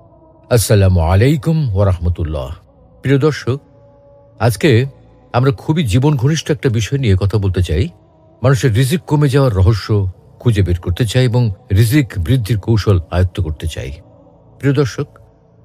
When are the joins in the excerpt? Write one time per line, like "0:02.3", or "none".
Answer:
none